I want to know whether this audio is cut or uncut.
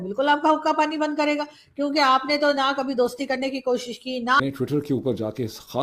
cut